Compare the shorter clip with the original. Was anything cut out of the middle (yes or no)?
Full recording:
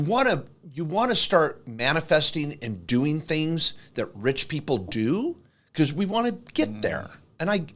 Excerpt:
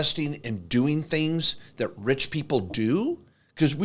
no